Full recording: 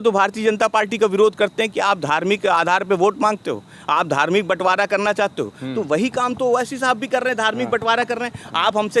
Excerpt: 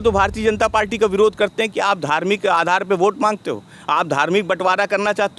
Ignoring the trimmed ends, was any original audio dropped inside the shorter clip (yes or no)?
no